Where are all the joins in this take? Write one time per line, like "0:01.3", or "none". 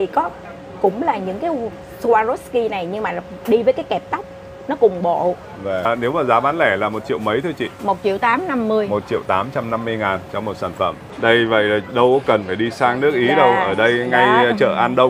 0:05.9
0:11.0